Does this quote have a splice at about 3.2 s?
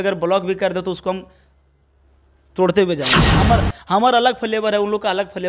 yes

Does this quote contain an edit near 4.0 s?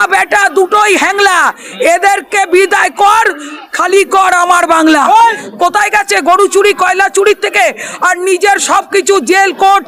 no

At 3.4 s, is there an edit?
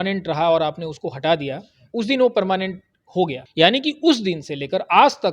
yes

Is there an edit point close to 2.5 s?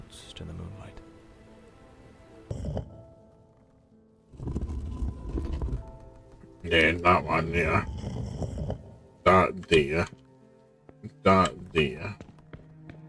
yes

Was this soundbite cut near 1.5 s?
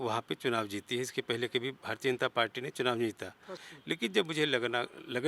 no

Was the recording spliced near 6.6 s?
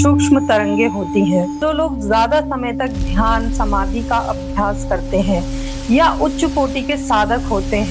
no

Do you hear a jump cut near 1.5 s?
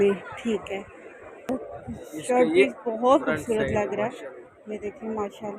yes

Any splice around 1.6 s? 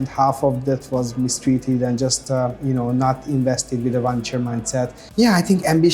no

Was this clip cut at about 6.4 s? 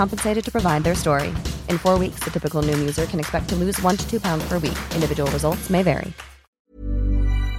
yes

